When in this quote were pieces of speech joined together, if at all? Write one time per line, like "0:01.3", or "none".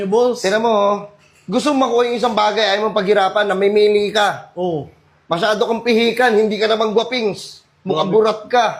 none